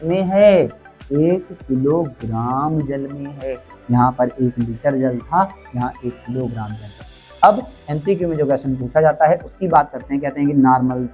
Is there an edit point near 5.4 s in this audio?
no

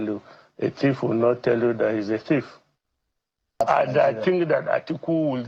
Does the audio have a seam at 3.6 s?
yes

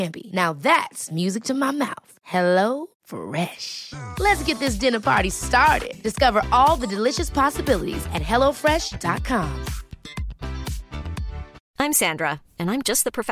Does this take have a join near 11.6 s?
yes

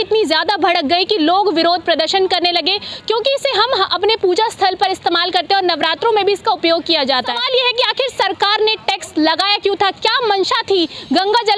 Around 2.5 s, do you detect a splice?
no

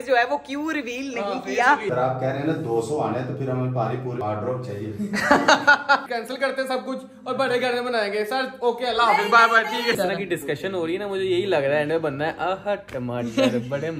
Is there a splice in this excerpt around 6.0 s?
yes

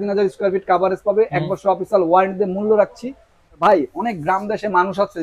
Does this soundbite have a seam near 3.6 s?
yes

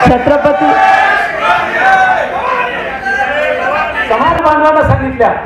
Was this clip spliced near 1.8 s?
no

